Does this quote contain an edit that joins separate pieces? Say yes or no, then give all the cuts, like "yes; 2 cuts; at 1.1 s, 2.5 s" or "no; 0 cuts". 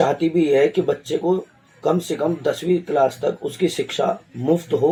no; 0 cuts